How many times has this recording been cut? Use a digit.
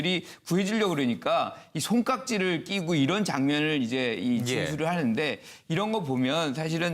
1